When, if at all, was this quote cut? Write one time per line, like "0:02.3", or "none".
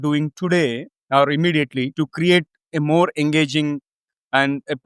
none